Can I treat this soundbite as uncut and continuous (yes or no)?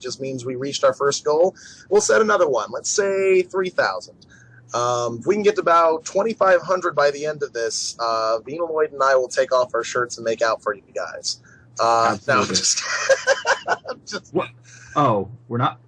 yes